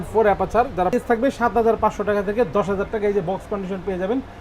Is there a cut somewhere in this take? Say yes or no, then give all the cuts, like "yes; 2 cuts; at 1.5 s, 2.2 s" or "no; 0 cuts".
yes; 1 cut; at 0.9 s